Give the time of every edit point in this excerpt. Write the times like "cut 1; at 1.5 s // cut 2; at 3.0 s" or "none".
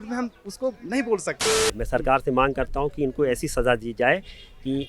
cut 1; at 1.8 s